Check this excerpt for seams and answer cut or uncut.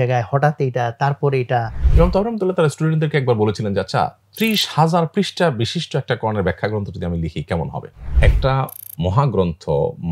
cut